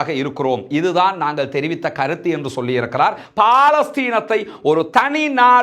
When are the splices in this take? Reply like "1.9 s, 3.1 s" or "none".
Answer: 3.2 s